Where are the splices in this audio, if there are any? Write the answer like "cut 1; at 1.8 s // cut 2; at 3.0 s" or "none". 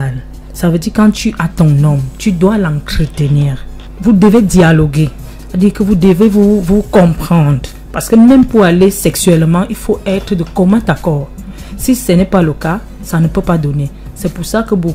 none